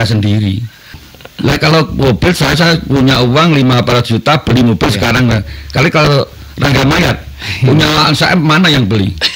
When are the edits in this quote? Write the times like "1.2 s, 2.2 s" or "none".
1.1 s

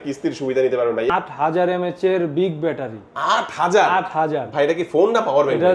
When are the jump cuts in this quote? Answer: 1.1 s

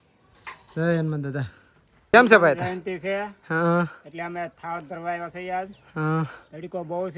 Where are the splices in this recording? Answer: 2.1 s

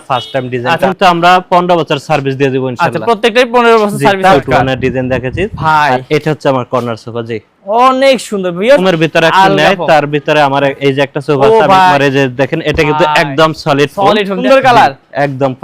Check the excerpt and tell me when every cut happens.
0.8 s, 4.4 s, 8.8 s, 11.9 s, 14.4 s

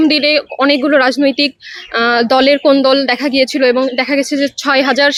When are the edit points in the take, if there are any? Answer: none

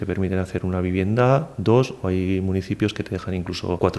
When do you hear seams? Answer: none

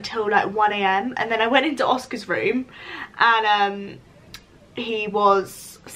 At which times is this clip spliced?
none

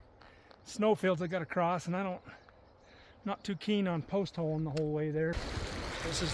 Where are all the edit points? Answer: 5.4 s

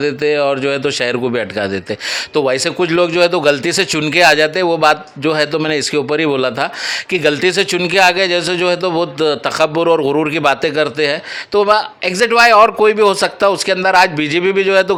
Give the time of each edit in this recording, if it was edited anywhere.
none

